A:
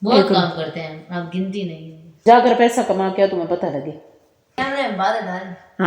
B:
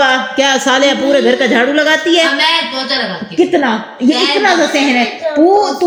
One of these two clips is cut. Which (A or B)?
A